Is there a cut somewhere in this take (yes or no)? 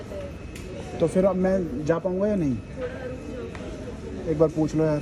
no